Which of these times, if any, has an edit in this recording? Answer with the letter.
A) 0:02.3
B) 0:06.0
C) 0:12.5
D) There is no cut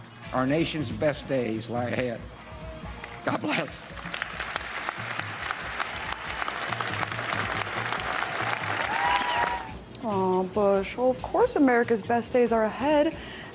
B